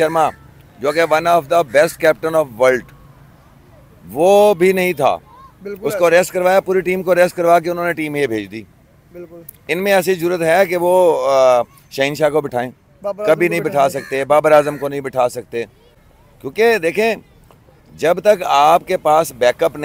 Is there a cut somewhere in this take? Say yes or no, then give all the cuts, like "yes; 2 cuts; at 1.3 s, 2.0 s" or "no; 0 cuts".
no; 0 cuts